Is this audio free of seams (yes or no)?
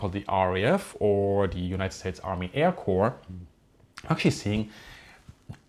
yes